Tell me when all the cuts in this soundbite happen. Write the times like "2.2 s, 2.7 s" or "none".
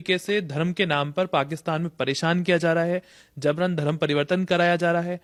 none